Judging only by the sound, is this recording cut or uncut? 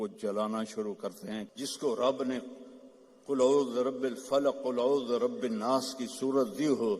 cut